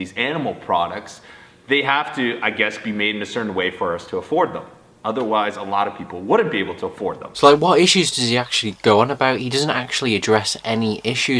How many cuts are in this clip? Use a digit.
1